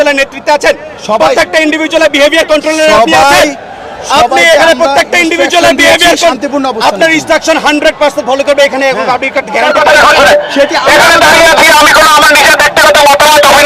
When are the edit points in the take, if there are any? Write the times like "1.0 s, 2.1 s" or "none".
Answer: 9.7 s